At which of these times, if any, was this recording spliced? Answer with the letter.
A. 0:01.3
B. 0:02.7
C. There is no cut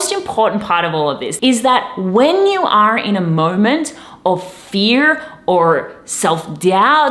A